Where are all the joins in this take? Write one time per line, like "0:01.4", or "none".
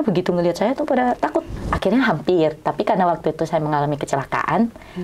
0:01.6